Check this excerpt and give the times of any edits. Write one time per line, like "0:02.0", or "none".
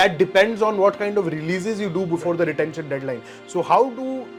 none